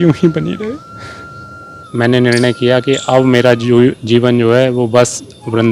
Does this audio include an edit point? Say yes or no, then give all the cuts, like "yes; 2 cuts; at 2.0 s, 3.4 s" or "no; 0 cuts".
yes; 1 cut; at 1.8 s